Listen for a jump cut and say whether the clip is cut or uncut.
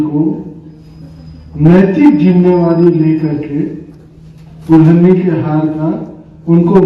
uncut